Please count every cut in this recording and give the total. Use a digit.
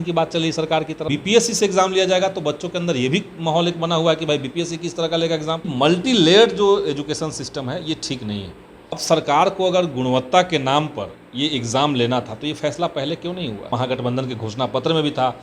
4